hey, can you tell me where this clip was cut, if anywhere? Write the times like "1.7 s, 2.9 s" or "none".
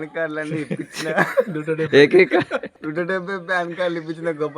2.8 s